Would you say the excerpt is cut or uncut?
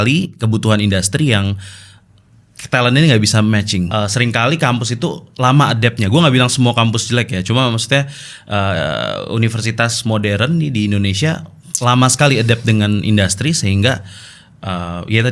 cut